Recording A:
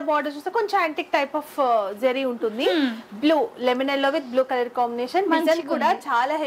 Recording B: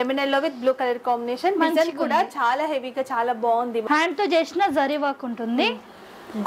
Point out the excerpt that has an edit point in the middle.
B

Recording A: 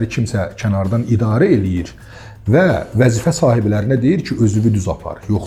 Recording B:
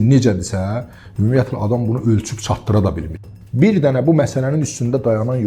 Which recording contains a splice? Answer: B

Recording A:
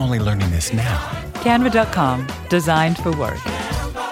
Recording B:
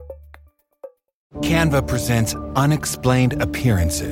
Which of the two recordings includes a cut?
B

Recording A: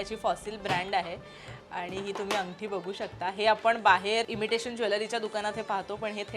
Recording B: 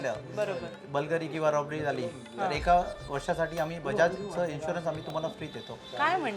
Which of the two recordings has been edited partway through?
A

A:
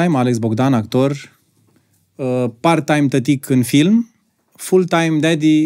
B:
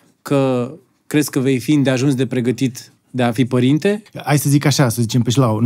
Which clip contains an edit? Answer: B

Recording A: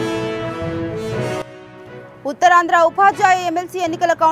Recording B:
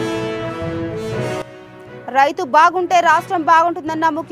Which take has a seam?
A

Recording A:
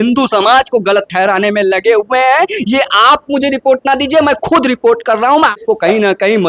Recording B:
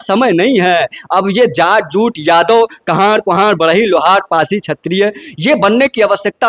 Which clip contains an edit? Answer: A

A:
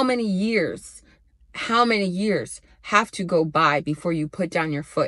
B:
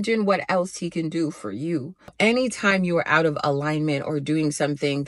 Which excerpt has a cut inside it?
B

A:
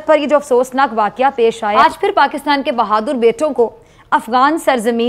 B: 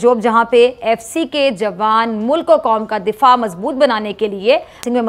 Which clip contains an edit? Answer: A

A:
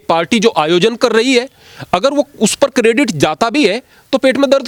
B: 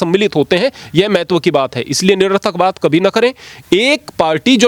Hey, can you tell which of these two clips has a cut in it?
B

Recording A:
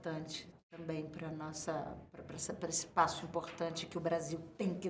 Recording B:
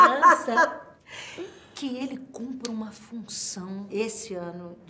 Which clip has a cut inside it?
B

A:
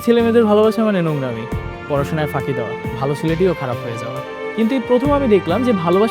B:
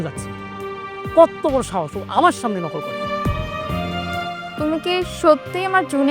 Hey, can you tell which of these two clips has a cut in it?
B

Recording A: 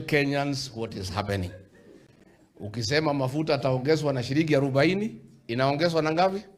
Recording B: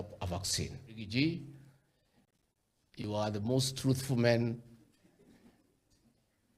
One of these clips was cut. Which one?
B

